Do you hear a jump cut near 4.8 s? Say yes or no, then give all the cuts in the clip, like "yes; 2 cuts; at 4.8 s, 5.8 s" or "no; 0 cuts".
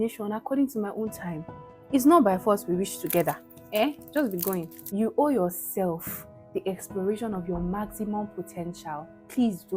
yes; 1 cut; at 4.8 s